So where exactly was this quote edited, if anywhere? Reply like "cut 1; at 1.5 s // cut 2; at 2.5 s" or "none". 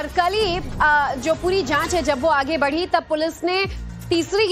cut 1; at 2.0 s

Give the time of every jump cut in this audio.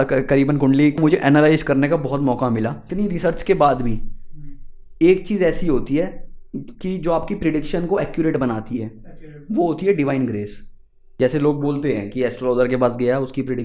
cut 1; at 1.0 s // cut 2; at 2.8 s // cut 3; at 11.1 s

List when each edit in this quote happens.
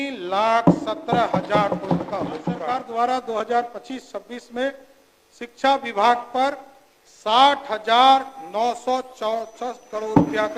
cut 1; at 2.7 s

